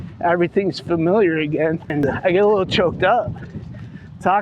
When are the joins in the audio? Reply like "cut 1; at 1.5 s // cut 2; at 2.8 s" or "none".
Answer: cut 1; at 1.9 s